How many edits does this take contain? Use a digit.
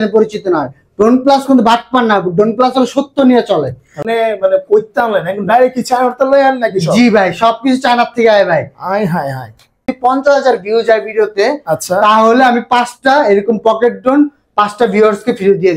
2